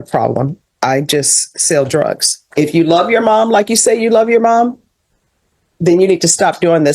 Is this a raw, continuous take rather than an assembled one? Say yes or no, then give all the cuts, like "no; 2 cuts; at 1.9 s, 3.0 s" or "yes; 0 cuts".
no; 1 cut; at 2.5 s